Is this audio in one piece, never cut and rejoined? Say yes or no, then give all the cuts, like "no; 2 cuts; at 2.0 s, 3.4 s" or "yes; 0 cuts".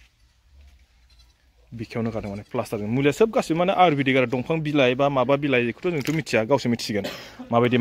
yes; 0 cuts